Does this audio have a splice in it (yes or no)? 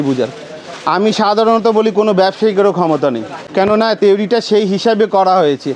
no